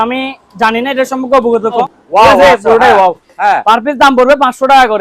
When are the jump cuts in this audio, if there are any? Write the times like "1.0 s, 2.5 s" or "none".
2.0 s